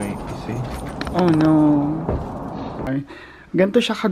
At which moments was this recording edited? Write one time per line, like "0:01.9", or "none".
0:02.9